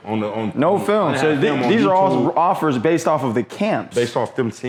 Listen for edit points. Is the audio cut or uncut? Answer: uncut